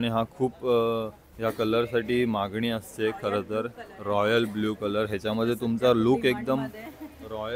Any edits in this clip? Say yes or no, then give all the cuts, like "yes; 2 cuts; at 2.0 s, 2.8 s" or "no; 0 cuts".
no; 0 cuts